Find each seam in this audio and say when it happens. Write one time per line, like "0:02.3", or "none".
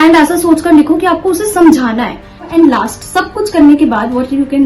0:02.5